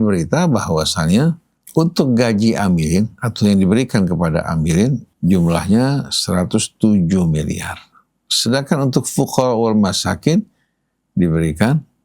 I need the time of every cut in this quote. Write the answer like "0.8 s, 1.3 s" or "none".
1.5 s, 5.1 s